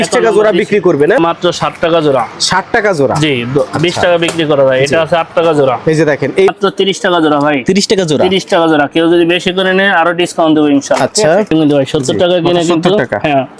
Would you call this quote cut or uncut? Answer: cut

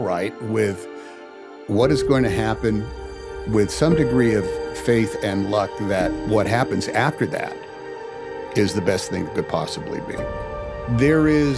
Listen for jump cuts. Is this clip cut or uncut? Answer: cut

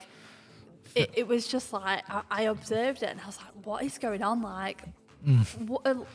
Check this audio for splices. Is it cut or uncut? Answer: uncut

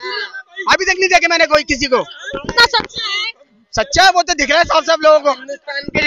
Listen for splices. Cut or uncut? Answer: uncut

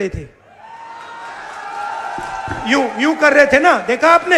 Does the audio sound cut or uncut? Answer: uncut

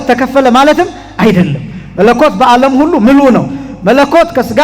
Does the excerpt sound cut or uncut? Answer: uncut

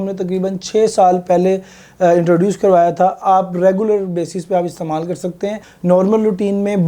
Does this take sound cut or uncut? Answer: cut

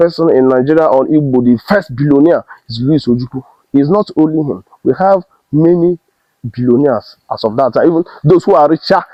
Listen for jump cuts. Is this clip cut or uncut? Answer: uncut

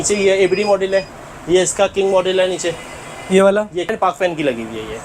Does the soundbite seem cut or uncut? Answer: cut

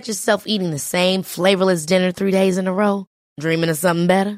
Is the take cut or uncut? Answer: uncut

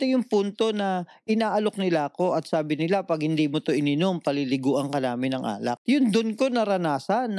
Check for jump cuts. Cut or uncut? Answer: cut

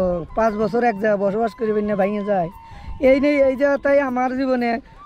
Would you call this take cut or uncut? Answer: uncut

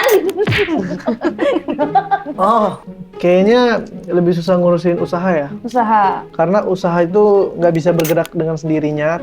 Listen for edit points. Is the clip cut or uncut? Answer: cut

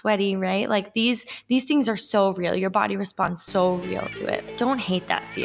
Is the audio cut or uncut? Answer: cut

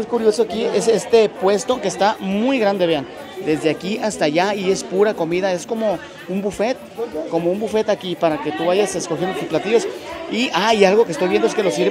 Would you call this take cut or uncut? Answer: uncut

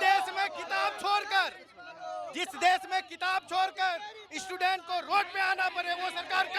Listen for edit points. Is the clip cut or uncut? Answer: uncut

